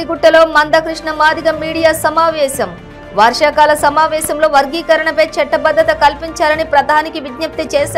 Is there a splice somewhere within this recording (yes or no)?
no